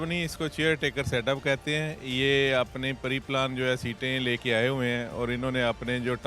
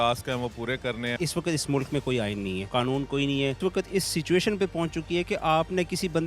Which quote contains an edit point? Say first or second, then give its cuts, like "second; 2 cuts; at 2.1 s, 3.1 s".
second; 3 cuts; at 1.1 s, 2.6 s, 3.6 s